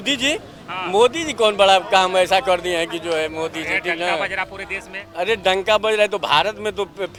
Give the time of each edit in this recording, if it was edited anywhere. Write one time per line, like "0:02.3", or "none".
none